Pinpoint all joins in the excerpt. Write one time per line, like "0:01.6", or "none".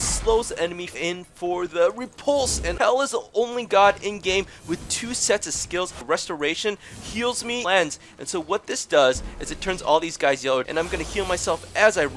0:01.0
0:02.6
0:06.0
0:07.6
0:10.7